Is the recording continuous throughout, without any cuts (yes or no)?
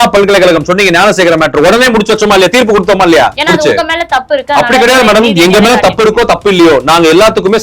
no